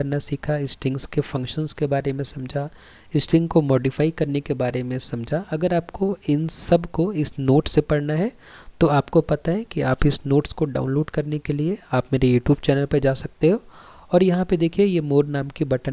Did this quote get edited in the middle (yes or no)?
no